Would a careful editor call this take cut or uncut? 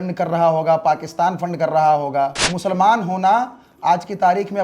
cut